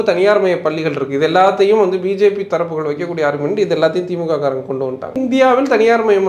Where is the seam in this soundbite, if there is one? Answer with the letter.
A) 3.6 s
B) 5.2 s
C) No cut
B